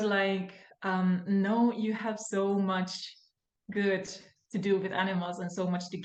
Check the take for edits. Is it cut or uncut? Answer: uncut